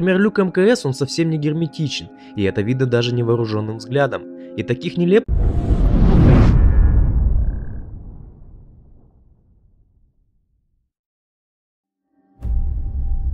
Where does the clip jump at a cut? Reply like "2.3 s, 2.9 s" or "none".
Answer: none